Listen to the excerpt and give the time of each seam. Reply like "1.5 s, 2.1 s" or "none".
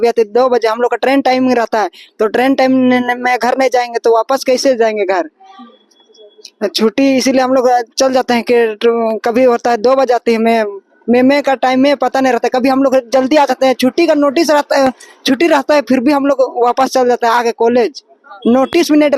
none